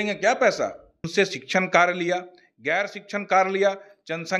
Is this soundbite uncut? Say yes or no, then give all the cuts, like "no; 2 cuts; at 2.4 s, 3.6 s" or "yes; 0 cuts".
no; 1 cut; at 0.9 s